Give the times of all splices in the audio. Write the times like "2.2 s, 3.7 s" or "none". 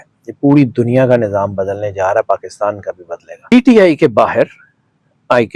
3.5 s

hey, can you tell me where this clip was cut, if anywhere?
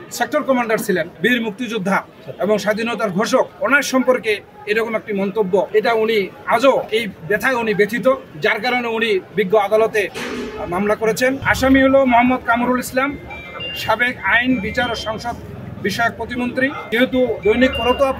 1.1 s, 2.2 s, 3.5 s, 5.7 s, 6.9 s, 8.3 s, 10.2 s, 11.5 s, 16.8 s

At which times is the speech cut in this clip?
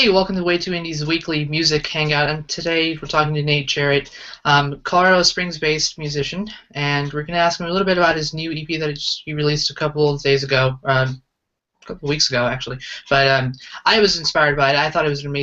none

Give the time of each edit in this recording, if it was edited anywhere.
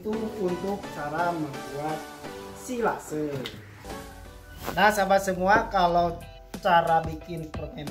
3.7 s

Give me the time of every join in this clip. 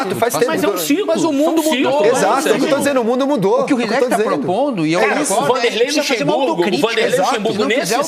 none

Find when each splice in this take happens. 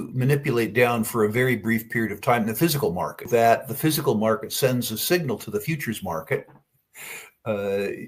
3.3 s

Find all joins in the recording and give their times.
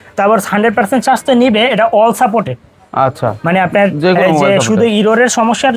none

